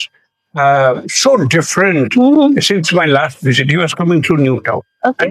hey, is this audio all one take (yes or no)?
yes